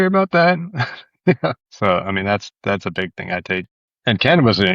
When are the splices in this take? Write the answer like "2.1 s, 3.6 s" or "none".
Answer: 1.7 s, 3.8 s